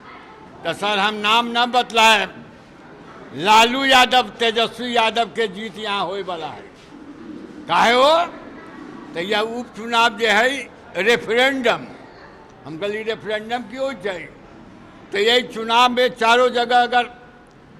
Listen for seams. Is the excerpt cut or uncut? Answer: uncut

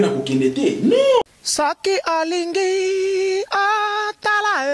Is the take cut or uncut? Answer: cut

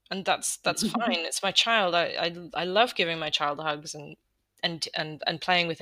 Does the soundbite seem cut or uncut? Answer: uncut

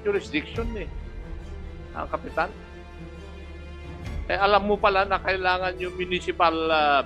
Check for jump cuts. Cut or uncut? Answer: cut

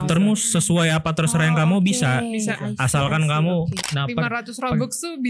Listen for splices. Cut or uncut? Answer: cut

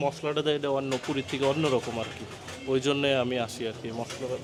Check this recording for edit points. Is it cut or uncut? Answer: uncut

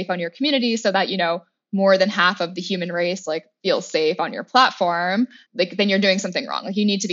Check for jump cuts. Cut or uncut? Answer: uncut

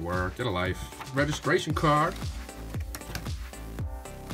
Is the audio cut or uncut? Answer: cut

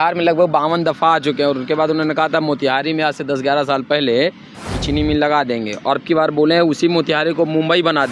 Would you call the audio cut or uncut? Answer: uncut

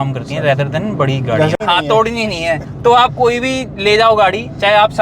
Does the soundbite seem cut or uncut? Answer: cut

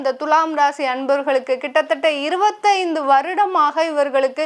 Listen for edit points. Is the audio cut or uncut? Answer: uncut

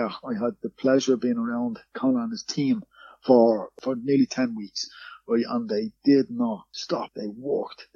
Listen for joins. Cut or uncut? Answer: cut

